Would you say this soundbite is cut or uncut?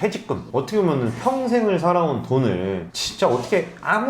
uncut